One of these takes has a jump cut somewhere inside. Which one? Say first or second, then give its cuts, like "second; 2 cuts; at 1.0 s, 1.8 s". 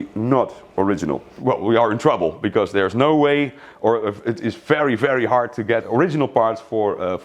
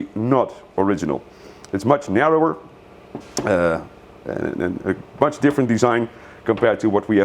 first; 2 cuts; at 1.3 s, 5.8 s